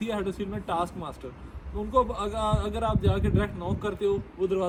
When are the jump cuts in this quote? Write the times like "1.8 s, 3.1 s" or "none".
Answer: none